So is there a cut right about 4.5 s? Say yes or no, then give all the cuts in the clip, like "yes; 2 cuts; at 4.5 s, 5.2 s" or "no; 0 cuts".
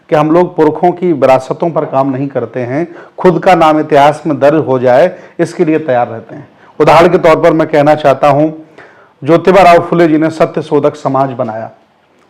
no; 0 cuts